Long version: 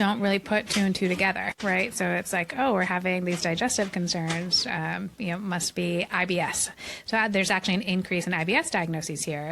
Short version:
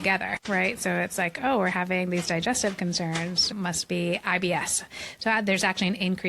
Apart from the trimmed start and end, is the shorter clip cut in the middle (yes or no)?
yes